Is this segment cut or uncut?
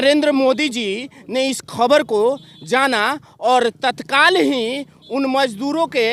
uncut